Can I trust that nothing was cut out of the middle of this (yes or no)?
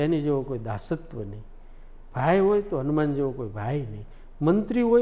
yes